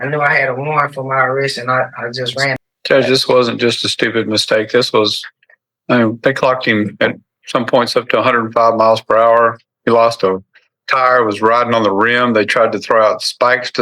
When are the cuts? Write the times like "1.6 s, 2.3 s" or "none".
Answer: 2.6 s